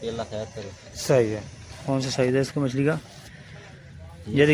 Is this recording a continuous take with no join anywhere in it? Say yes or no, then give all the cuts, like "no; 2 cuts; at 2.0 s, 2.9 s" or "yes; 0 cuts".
no; 1 cut; at 1.7 s